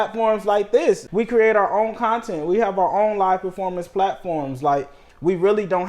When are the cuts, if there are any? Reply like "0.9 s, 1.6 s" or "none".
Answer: 1.1 s